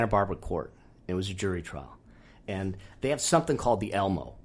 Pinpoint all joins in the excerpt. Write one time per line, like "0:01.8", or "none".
none